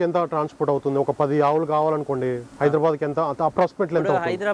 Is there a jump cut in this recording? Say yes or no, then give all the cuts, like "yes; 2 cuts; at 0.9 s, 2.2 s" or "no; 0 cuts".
no; 0 cuts